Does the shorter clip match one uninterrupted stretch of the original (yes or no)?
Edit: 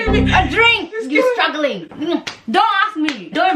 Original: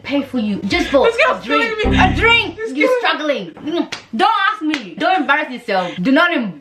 yes